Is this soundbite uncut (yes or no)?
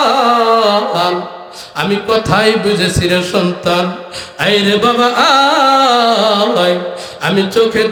yes